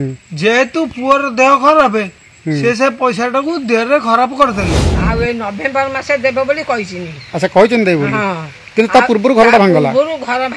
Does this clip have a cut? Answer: yes; 1 cut; at 4.9 s

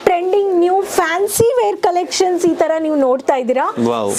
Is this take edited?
no; 0 cuts

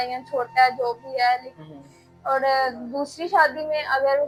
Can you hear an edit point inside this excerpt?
no; 0 cuts

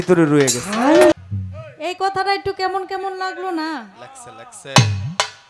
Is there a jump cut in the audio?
yes; 1 cut; at 1.1 s

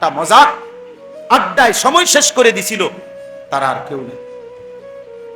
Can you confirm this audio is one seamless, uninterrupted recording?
no; 1 cut; at 4.4 s

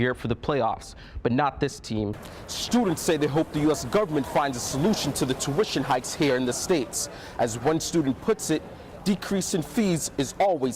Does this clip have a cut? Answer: yes; 1 cut; at 2.3 s

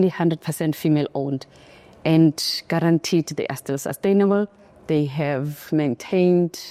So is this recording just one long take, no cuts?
yes; 0 cuts

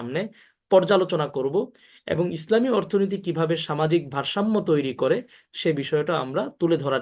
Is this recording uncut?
yes; 0 cuts

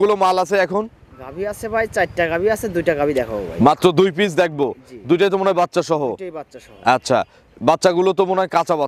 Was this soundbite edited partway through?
no; 0 cuts

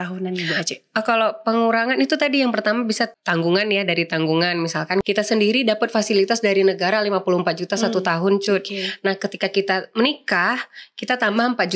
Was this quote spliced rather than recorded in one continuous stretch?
yes; 2 cuts; at 3.1 s, 5.0 s

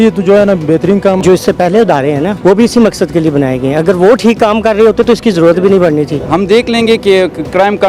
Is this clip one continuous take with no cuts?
no; 3 cuts; at 1.2 s, 2.3 s, 6.2 s

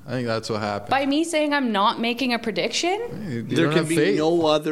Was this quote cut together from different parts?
yes; 1 cut; at 3.2 s

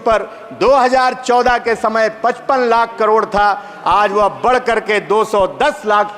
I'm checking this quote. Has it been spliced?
no; 0 cuts

